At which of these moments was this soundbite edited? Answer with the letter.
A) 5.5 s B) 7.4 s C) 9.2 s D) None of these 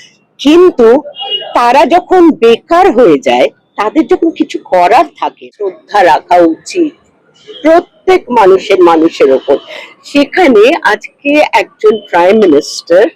A